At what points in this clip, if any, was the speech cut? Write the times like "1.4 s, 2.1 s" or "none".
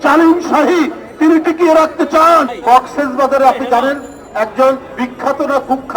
2.5 s